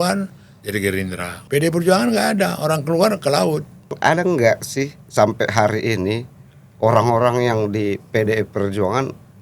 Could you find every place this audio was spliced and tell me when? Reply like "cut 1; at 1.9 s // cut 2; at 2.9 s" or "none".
cut 1; at 1.3 s // cut 2; at 3.9 s